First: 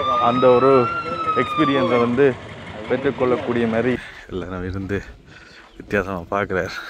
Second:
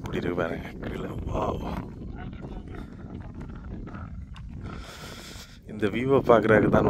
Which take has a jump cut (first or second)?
first